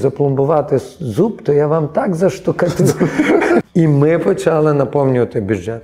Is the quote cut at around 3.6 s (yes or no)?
yes